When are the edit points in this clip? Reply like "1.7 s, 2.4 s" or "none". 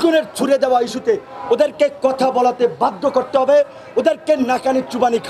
none